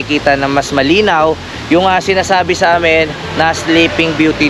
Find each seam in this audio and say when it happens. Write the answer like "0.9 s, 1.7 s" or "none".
none